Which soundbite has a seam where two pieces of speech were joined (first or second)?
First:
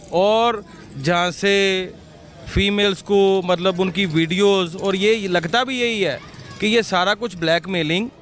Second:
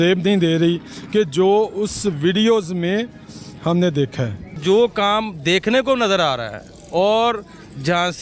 second